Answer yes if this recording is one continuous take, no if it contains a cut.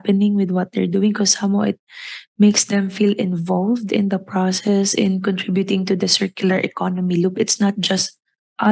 yes